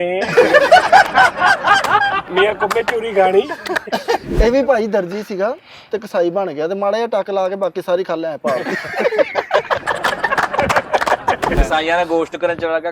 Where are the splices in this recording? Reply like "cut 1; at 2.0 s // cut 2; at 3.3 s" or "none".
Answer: cut 1; at 4.3 s // cut 2; at 11.5 s